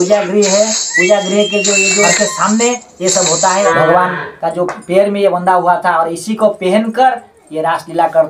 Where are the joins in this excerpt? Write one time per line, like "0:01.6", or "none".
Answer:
0:02.1
0:03.7